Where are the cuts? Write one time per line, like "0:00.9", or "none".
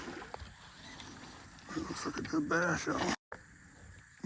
none